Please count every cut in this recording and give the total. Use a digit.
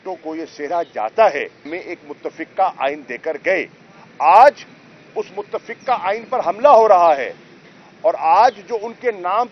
1